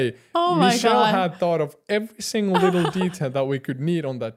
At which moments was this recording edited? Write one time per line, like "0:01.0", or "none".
none